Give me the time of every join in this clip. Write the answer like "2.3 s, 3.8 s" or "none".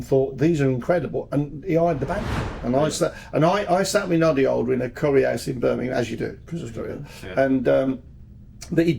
2.5 s